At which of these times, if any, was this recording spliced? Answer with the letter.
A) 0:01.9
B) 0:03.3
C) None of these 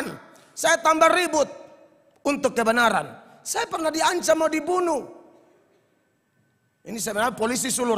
C